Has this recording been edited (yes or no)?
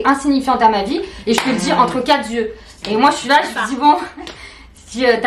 no